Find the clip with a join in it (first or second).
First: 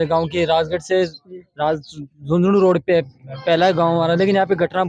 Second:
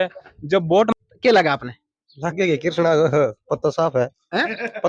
second